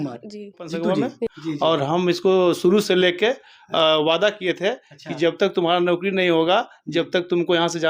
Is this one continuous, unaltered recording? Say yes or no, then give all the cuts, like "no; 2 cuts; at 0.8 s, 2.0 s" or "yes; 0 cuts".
no; 1 cut; at 1.1 s